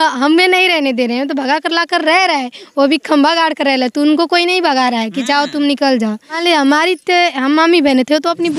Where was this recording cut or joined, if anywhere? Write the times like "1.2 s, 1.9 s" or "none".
6.4 s